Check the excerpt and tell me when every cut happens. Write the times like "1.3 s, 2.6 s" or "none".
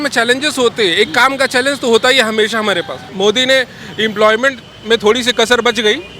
3.0 s